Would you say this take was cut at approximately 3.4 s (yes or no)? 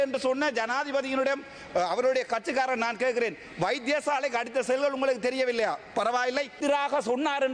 no